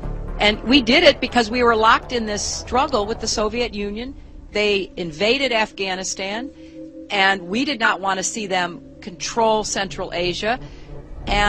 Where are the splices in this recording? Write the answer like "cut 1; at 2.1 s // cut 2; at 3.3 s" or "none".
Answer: none